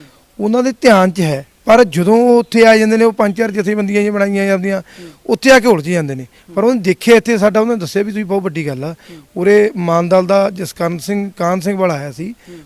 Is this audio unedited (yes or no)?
yes